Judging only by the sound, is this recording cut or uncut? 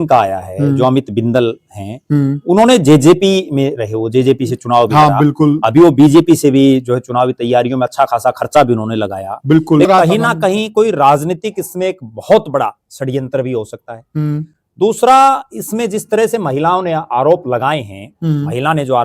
cut